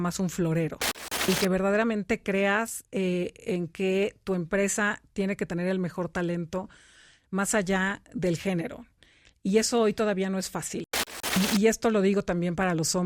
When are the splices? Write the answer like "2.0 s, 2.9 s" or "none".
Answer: 1.3 s, 11.1 s

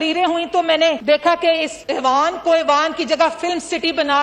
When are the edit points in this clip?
1.0 s, 1.8 s

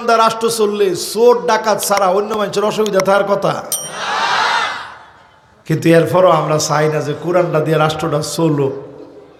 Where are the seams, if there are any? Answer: none

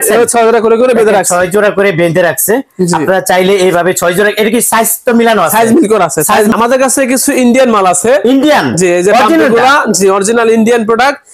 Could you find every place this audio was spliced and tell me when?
6.5 s

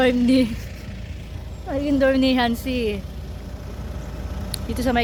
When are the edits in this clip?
none

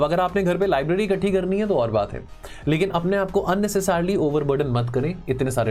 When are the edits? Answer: none

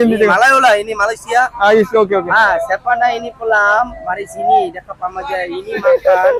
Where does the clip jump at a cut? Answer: none

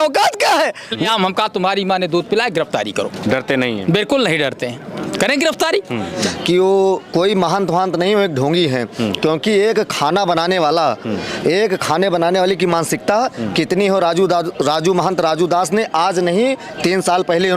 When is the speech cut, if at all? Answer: 1.0 s, 6.2 s

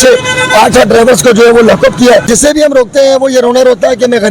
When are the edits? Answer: 2.3 s

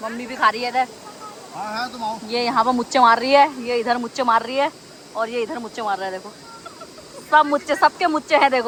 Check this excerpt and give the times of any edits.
none

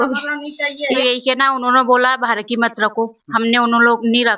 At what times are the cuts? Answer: 1.0 s

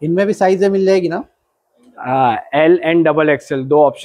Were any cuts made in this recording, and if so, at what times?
none

